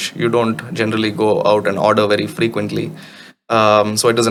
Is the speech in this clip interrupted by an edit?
no; 0 cuts

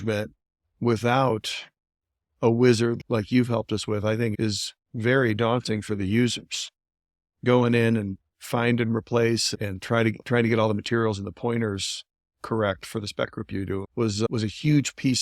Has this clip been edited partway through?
yes; 4 cuts; at 3.0 s, 4.3 s, 9.5 s, 14.3 s

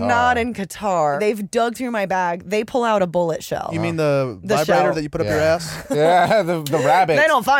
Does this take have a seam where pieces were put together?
yes; 2 cuts; at 1.2 s, 3.7 s

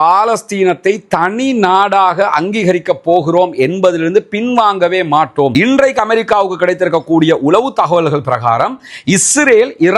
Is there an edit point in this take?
yes; 1 cut; at 5.5 s

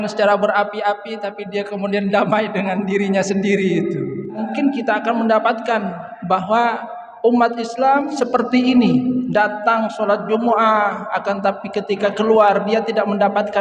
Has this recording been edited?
yes; 2 cuts; at 4.5 s, 8.1 s

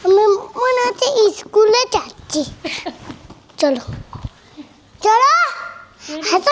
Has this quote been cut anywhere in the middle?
no; 0 cuts

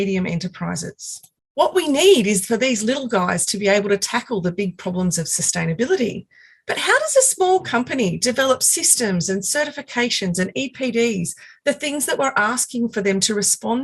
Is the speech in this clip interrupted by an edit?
no; 0 cuts

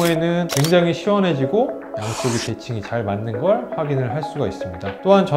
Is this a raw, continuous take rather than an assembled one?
yes; 0 cuts

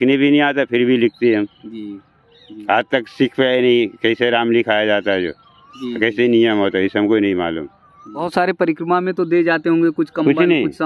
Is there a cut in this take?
yes; 1 cut; at 8.3 s

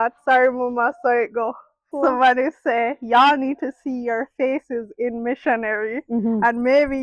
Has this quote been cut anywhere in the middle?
yes; 1 cut; at 1.8 s

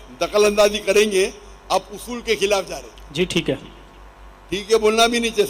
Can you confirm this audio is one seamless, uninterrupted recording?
yes; 0 cuts

